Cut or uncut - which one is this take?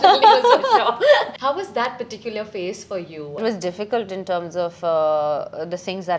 cut